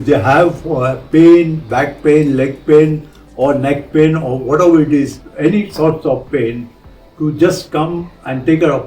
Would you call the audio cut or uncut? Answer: uncut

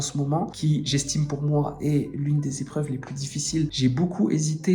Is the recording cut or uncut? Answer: cut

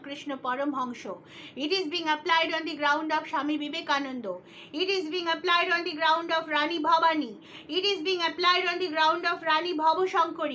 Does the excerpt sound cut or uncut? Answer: uncut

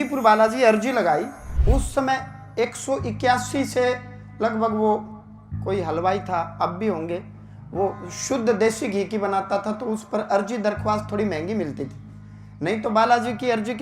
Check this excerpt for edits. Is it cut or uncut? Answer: cut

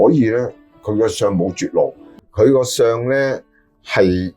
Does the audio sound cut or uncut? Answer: cut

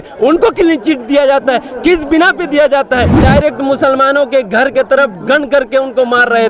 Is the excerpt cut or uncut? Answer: cut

